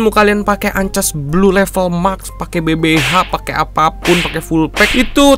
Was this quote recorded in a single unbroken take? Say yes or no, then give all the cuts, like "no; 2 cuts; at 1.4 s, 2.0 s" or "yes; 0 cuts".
yes; 0 cuts